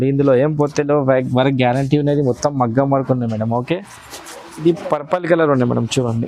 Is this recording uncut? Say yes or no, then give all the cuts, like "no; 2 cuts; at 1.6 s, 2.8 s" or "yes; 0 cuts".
no; 1 cut; at 4.6 s